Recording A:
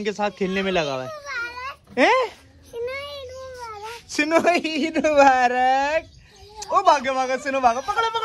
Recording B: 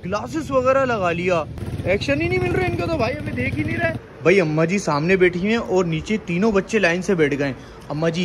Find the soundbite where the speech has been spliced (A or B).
B